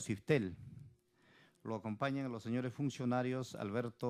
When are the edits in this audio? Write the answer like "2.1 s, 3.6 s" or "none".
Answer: 1.6 s